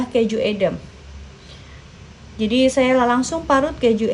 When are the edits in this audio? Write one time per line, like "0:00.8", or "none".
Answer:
none